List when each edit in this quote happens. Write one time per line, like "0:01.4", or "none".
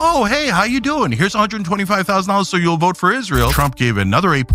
0:03.5